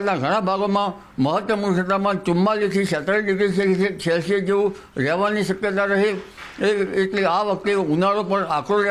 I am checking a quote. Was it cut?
no; 0 cuts

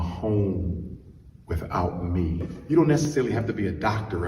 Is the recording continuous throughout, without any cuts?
no; 1 cut; at 2.6 s

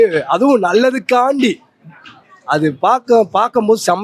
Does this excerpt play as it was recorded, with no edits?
yes; 0 cuts

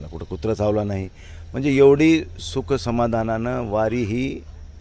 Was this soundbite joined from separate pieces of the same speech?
no; 0 cuts

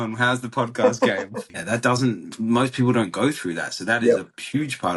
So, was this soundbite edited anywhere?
yes; 1 cut; at 1.5 s

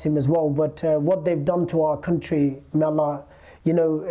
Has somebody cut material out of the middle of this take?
no; 0 cuts

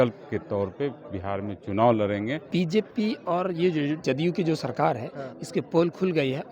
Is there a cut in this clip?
yes; 2 cuts; at 2.4 s, 4.0 s

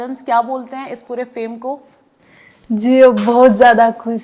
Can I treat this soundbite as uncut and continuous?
yes; 0 cuts

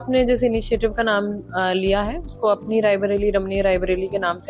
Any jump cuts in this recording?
no; 0 cuts

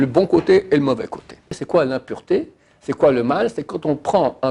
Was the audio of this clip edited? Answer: yes; 1 cut; at 1.6 s

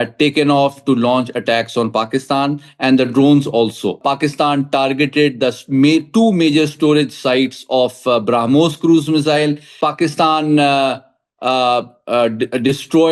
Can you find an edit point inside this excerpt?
yes; 2 cuts; at 4.0 s, 9.7 s

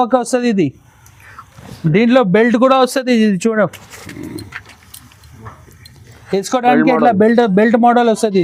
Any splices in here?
no; 0 cuts

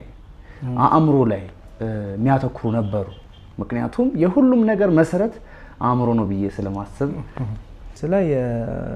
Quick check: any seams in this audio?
yes; 1 cut; at 8.0 s

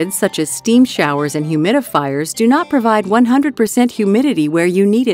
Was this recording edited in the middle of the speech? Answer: no; 0 cuts

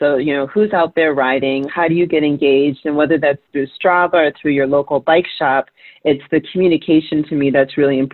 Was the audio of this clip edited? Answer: no; 0 cuts

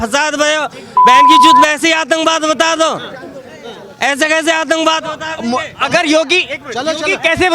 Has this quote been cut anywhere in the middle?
no; 0 cuts

